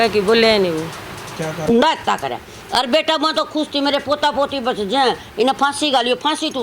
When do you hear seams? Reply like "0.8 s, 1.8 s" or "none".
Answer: 1.7 s